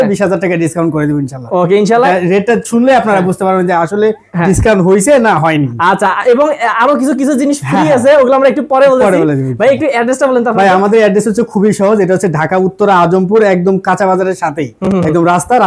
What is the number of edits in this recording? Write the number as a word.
zero